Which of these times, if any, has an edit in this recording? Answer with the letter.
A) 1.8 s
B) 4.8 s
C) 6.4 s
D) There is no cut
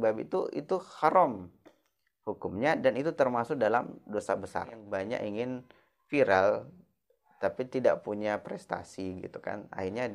B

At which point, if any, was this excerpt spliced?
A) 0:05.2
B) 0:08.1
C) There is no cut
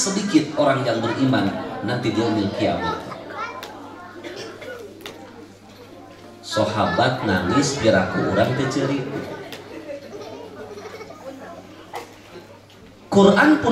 C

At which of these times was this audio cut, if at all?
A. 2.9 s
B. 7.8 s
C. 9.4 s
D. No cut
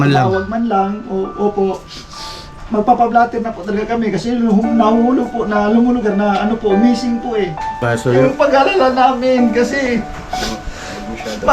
B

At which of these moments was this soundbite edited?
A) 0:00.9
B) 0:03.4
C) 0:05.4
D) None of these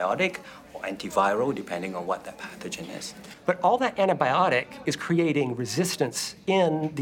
B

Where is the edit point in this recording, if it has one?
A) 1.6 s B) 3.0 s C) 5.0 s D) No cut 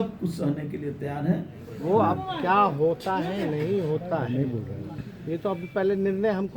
A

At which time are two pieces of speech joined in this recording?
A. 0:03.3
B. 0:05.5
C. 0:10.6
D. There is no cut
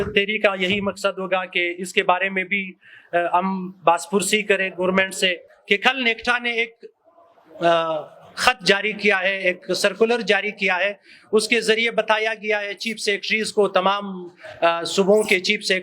B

